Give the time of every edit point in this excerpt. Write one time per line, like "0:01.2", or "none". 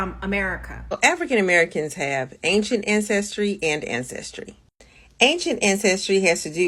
0:01.0